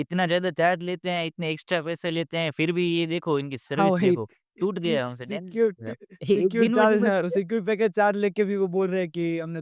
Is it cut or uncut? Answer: uncut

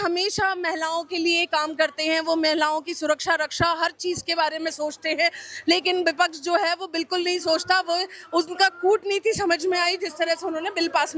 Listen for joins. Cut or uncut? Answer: uncut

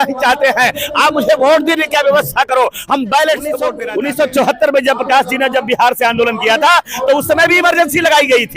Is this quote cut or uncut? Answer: cut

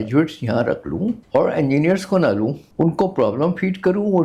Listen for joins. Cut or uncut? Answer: cut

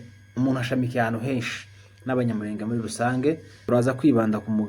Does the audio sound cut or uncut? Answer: cut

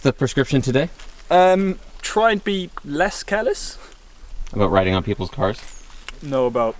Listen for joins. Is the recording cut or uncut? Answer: cut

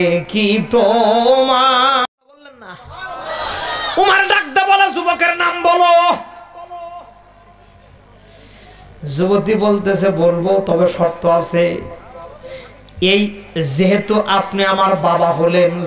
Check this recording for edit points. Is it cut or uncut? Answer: cut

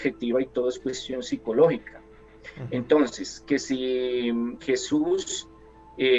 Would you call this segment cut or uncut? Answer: uncut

